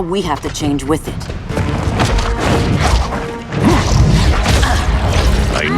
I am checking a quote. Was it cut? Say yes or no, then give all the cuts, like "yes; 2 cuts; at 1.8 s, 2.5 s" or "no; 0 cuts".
yes; 1 cut; at 1.5 s